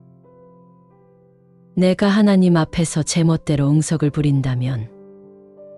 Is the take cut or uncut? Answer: uncut